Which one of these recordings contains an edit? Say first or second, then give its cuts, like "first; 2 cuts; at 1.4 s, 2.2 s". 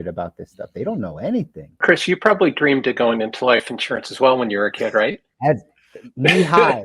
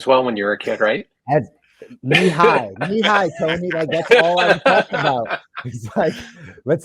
first; 1 cut; at 1.8 s